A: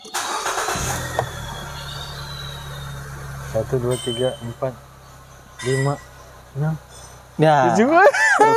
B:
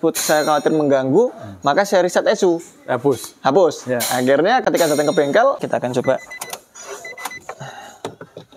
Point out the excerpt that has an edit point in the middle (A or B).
B